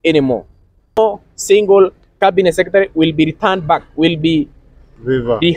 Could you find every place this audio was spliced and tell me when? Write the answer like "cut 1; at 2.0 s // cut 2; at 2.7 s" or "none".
cut 1; at 1.0 s